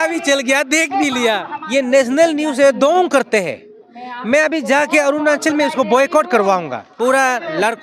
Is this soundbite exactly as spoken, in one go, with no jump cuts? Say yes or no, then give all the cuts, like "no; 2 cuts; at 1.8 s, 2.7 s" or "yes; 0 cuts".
no; 2 cuts; at 1.5 s, 6.8 s